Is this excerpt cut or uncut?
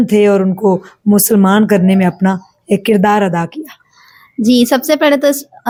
uncut